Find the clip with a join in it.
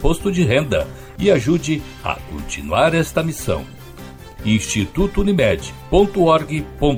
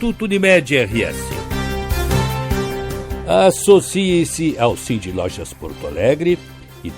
second; 2 cuts; at 1.2 s, 3.0 s

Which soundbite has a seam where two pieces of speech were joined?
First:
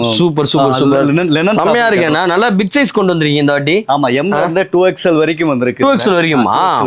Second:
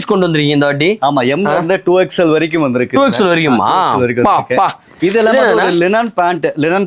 second; 1 cut; at 4.9 s

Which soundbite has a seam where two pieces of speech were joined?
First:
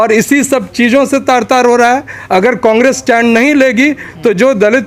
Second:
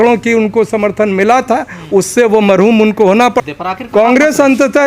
second; 1 cut; at 3.4 s

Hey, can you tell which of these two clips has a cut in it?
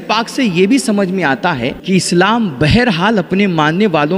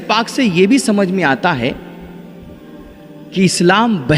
first; 1 cut; at 1.8 s

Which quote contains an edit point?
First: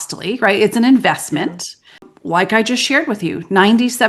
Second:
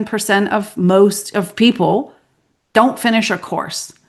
first; 1 cut; at 2.1 s

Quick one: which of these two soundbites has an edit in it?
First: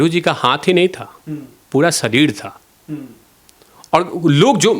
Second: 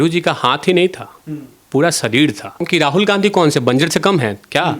second; 1 cut; at 2.7 s

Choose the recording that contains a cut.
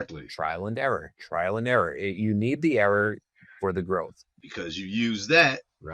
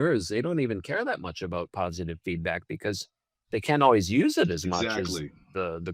first; 1 cut; at 4.3 s

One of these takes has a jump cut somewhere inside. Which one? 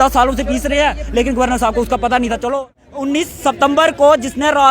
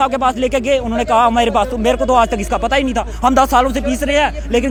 first; 1 cut; at 2.8 s

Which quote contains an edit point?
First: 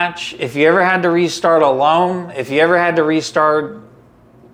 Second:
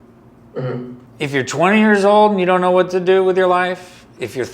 second; 1 cut; at 1.1 s

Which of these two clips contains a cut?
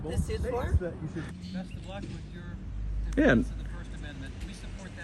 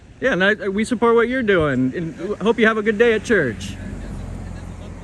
first; 1 cut; at 1.3 s

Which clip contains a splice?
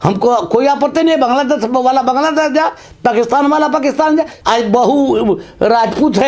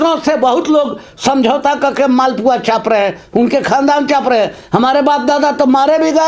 first; 1 cut; at 4.3 s

